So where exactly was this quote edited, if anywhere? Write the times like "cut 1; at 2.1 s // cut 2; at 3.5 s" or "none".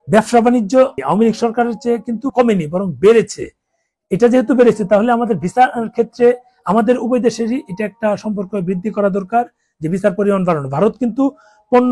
cut 1; at 1.0 s // cut 2; at 2.3 s